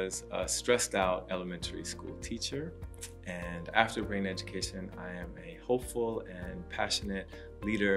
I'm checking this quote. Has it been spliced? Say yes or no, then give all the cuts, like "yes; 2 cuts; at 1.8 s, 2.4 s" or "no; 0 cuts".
no; 0 cuts